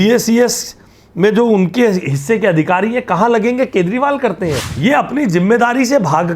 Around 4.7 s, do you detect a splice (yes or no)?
yes